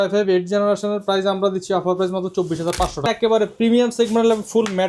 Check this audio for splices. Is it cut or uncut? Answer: cut